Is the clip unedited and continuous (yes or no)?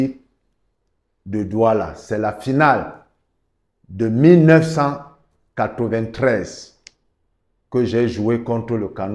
yes